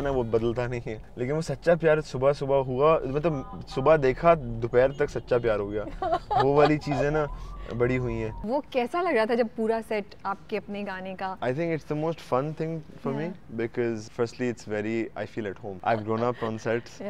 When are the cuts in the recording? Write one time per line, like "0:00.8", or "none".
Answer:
0:01.0
0:08.4
0:11.3
0:14.0
0:15.7

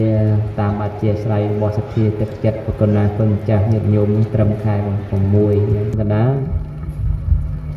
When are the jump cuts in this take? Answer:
0:05.9

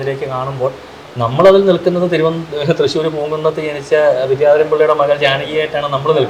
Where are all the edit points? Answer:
none

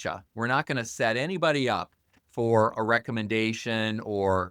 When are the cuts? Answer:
0:02.7

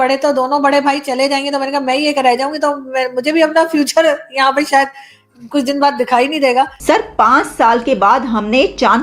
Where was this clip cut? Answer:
0:06.8

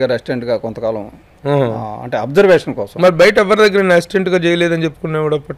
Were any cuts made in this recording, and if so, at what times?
none

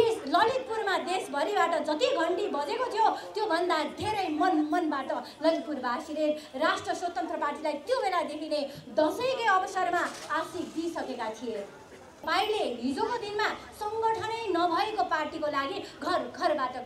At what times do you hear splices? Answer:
0:12.2

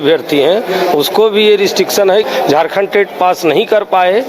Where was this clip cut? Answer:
0:02.3

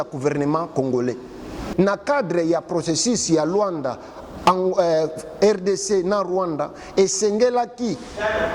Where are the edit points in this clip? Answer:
0:01.6

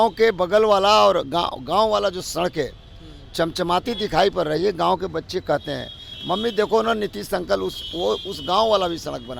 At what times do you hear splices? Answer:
none

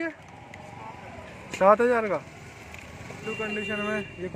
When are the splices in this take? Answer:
none

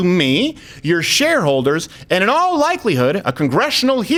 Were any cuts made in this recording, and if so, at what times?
none

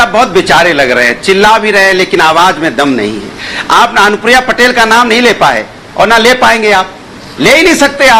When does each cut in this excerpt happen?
none

